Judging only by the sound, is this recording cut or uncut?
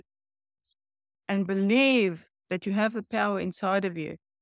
uncut